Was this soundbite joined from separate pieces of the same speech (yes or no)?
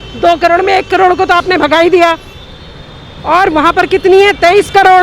no